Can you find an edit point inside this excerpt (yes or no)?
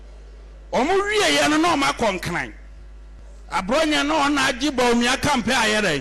no